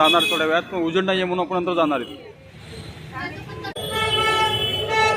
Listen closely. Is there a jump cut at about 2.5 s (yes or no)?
no